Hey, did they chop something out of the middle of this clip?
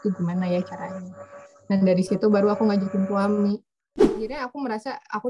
yes; 1 cut; at 4.3 s

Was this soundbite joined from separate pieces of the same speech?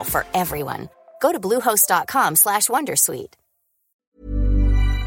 yes; 1 cut; at 3.9 s

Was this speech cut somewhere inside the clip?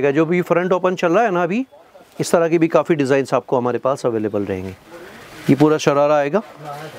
no; 0 cuts

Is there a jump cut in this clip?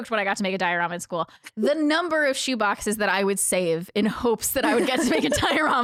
no; 0 cuts

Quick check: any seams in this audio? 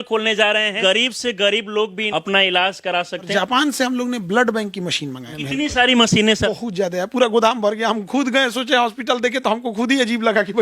yes; 5 cuts; at 0.8 s, 2.0 s, 3.3 s, 5.3 s, 6.5 s

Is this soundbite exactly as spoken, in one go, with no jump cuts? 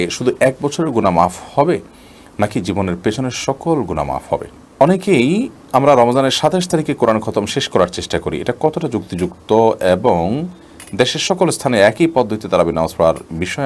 no; 1 cut; at 4.8 s

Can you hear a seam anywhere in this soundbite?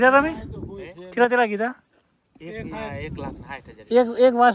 no; 0 cuts

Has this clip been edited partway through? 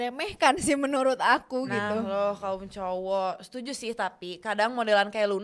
no; 0 cuts

